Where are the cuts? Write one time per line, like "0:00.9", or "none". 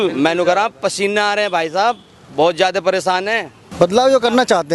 0:03.6